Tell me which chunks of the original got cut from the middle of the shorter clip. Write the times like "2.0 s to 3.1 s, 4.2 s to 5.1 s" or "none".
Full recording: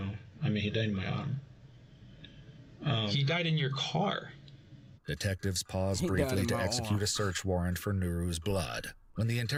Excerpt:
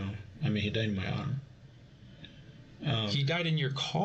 none